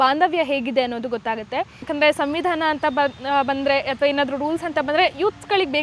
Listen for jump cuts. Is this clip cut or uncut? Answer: cut